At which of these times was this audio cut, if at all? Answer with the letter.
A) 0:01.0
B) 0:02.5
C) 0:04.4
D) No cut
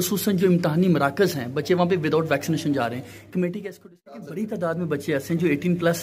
C